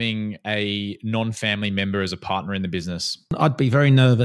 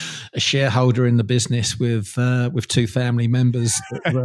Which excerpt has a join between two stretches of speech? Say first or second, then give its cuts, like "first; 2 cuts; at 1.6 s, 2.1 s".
first; 1 cut; at 3.3 s